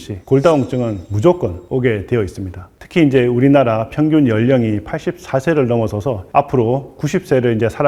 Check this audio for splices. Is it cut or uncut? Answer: uncut